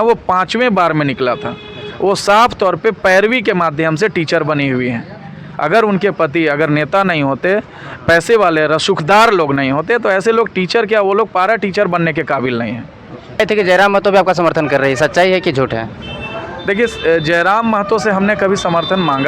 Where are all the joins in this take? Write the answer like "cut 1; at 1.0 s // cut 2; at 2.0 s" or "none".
cut 1; at 13.4 s